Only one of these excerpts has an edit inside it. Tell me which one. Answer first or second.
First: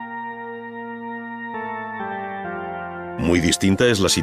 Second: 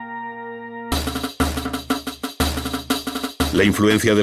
first